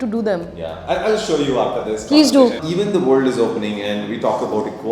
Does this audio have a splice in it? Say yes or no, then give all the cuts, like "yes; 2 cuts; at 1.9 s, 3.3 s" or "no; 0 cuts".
yes; 1 cut; at 2.6 s